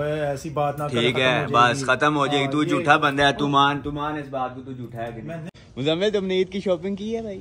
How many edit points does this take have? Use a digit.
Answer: 1